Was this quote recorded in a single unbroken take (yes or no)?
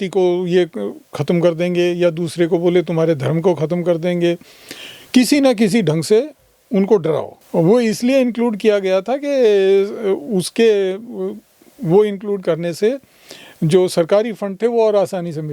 no